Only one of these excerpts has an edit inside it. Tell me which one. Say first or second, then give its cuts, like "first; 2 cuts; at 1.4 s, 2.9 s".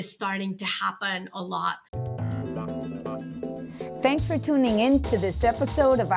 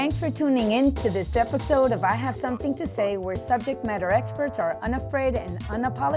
first; 1 cut; at 1.8 s